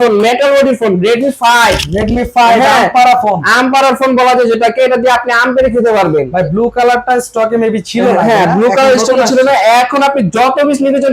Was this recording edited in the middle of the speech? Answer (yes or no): no